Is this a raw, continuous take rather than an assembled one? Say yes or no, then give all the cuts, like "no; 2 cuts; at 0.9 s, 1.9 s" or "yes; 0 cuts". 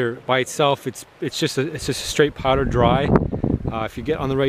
no; 1 cut; at 1.5 s